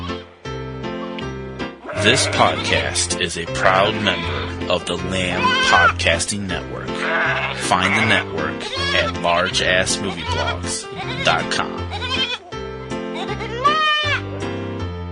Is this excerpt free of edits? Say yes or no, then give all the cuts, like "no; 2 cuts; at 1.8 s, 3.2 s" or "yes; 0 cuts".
yes; 0 cuts